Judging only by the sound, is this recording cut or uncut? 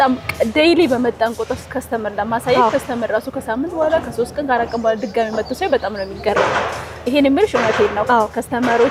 uncut